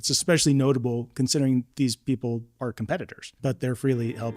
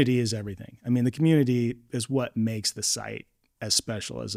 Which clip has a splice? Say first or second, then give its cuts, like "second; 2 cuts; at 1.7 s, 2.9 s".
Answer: first; 2 cuts; at 1.7 s, 3.2 s